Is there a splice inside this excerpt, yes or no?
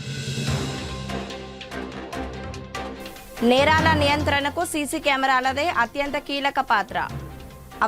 yes